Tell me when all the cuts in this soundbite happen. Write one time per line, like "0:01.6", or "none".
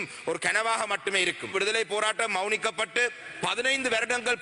0:01.5